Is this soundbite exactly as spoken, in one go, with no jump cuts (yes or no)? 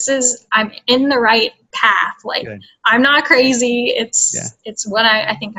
yes